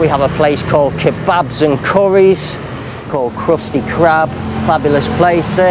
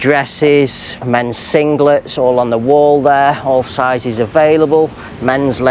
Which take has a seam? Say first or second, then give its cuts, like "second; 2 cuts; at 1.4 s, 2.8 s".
first; 1 cut; at 3.0 s